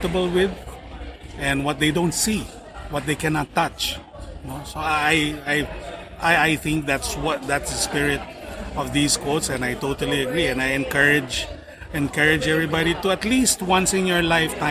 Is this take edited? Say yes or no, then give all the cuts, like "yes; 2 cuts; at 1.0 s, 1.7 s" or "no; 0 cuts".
no; 0 cuts